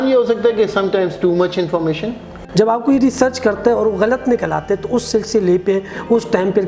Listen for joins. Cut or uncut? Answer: cut